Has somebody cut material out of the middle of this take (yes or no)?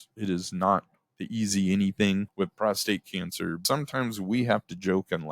yes